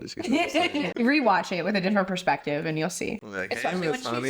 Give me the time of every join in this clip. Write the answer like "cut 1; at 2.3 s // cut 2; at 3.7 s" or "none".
cut 1; at 0.9 s // cut 2; at 3.4 s